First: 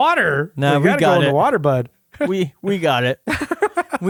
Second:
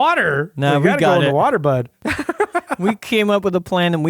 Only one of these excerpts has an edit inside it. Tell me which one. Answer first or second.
second